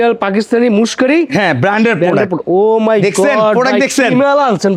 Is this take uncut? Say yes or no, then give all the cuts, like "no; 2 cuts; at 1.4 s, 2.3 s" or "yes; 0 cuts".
yes; 0 cuts